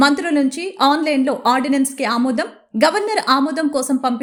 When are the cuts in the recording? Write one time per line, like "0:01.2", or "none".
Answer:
none